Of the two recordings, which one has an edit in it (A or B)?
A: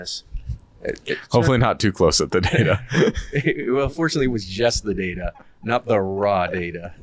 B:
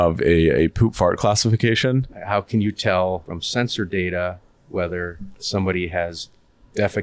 B